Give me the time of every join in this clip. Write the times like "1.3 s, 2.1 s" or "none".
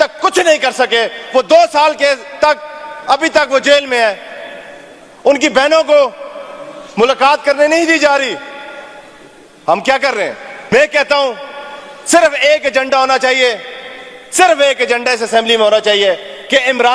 10.5 s